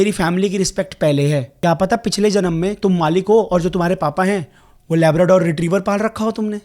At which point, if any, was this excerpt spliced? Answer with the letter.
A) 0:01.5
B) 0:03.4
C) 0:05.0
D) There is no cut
A